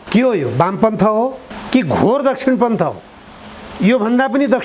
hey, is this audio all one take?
no; 1 cut; at 1.5 s

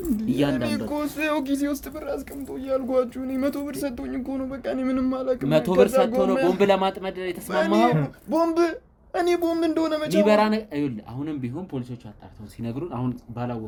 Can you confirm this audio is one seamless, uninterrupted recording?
yes; 0 cuts

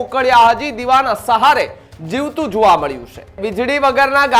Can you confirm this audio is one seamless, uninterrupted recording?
no; 1 cut; at 3.4 s

